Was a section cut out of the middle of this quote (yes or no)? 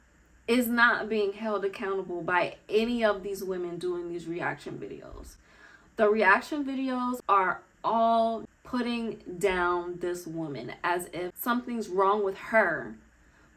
yes